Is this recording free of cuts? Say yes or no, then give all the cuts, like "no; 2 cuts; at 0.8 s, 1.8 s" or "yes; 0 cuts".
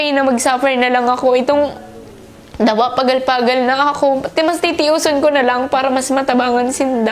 yes; 0 cuts